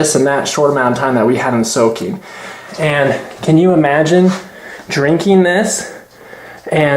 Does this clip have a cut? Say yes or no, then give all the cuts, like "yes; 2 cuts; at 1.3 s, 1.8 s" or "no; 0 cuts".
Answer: yes; 1 cut; at 2.6 s